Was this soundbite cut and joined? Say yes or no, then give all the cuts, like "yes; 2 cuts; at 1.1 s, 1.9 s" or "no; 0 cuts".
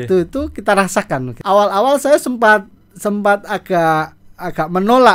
yes; 1 cut; at 1.3 s